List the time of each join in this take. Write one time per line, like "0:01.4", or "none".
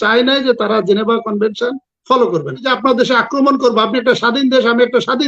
0:02.7